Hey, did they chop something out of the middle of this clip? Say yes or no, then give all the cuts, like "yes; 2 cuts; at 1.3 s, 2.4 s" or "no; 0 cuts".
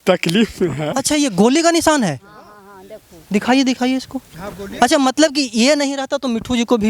yes; 1 cut; at 0.9 s